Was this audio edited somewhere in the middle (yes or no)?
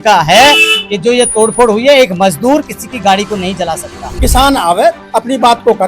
yes